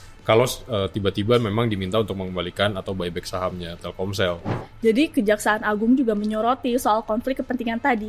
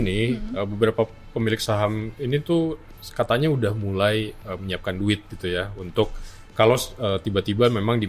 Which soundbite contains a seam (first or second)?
first